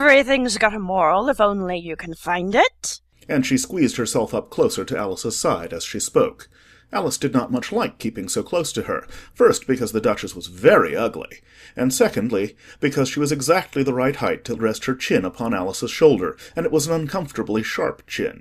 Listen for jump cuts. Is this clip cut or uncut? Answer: uncut